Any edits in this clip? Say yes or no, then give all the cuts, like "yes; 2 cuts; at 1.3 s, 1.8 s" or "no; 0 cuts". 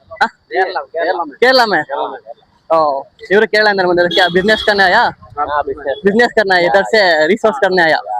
no; 0 cuts